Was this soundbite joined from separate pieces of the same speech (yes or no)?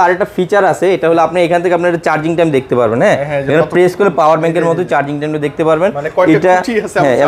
no